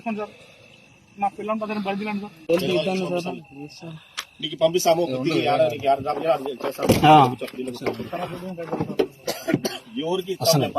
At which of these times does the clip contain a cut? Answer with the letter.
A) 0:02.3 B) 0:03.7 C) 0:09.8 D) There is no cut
A